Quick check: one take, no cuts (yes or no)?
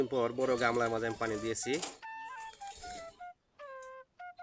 yes